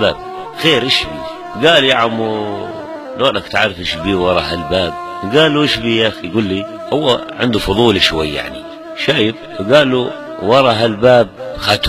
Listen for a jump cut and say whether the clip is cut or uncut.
uncut